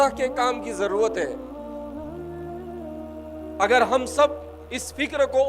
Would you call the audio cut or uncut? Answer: cut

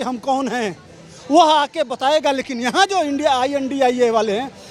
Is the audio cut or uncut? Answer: uncut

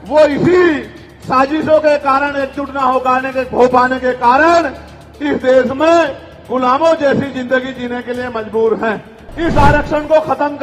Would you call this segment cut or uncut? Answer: cut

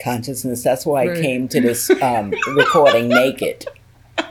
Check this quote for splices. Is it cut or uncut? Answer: uncut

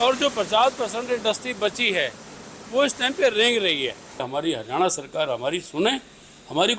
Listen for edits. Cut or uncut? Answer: cut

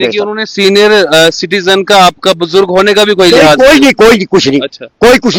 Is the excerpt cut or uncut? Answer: uncut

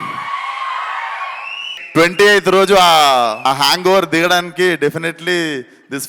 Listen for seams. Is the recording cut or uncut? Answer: cut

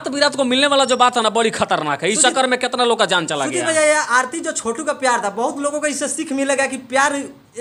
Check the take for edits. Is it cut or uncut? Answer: uncut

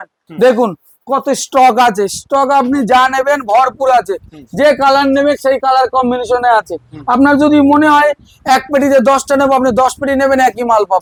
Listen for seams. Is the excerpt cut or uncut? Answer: uncut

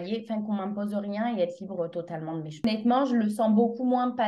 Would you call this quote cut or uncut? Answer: cut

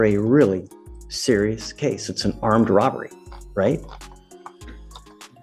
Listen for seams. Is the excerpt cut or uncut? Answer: uncut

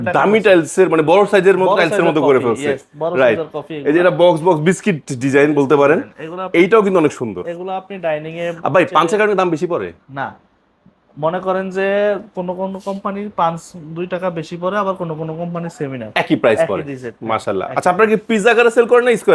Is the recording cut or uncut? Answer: uncut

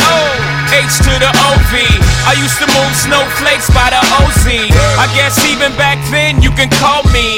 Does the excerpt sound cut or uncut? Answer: uncut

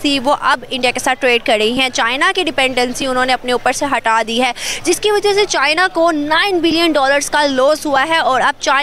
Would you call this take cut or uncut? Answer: uncut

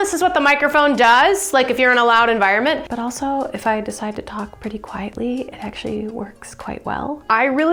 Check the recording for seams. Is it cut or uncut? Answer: uncut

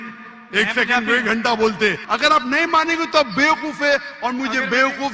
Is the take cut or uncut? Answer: cut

